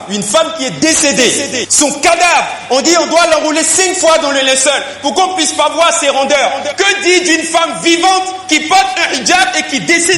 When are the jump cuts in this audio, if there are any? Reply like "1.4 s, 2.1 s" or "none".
none